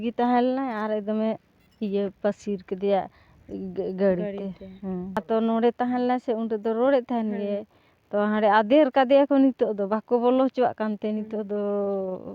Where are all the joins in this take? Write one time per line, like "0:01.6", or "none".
0:05.2